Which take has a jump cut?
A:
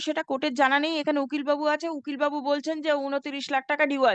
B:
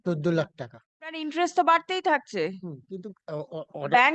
B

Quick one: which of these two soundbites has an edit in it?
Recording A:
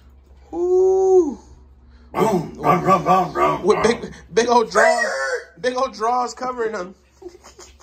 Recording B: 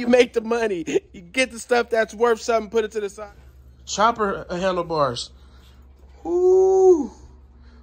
B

